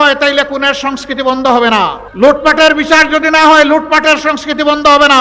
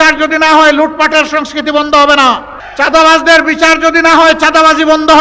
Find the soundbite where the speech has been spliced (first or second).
first